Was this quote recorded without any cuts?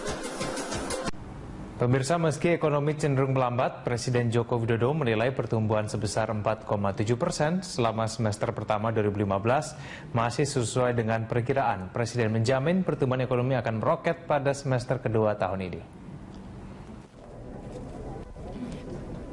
no; 1 cut; at 18.3 s

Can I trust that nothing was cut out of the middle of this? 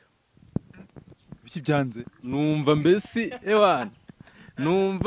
yes; 0 cuts

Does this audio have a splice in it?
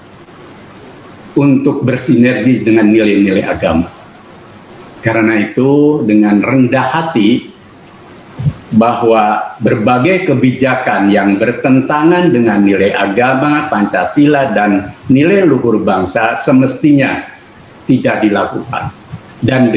no; 0 cuts

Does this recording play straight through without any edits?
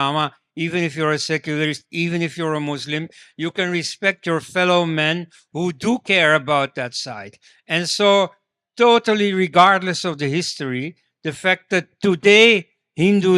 yes; 0 cuts

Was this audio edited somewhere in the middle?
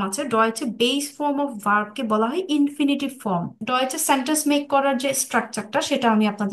yes; 1 cut; at 3.6 s

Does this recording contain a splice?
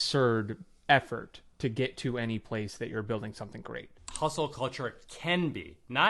yes; 1 cut; at 4.1 s

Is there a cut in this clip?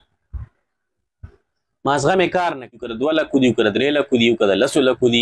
yes; 1 cut; at 2.9 s

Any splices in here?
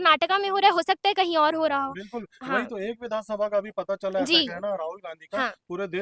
no; 0 cuts

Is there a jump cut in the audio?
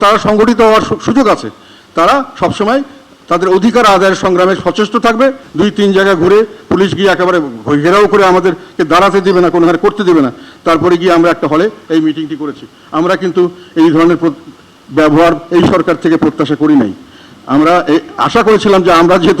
yes; 1 cut; at 5.4 s

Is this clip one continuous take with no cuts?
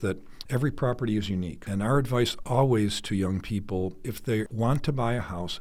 yes; 0 cuts

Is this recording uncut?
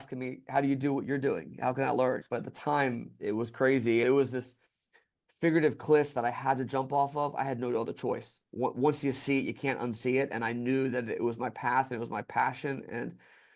no; 2 cuts; at 2.2 s, 4.0 s

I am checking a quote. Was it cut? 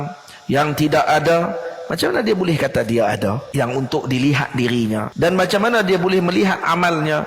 yes; 2 cuts; at 3.4 s, 5.1 s

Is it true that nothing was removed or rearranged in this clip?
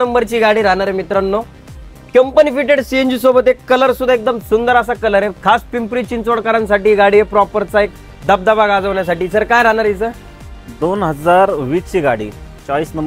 yes; 0 cuts

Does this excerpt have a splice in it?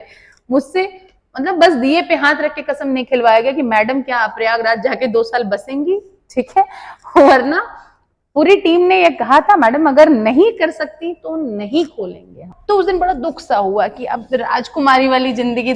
yes; 1 cut; at 12.5 s

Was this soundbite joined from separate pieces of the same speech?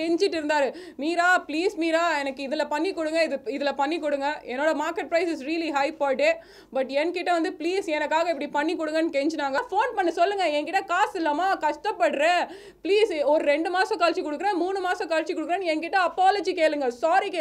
yes; 1 cut; at 9.6 s

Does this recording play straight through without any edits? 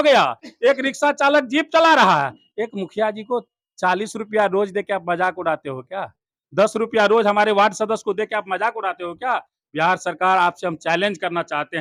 yes; 0 cuts

